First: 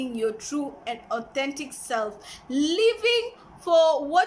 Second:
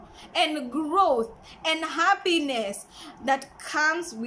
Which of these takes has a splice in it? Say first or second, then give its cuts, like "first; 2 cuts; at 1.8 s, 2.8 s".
first; 1 cut; at 2.3 s